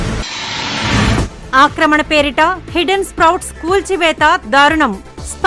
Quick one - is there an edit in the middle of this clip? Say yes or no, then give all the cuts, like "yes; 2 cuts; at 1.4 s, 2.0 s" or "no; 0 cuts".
no; 0 cuts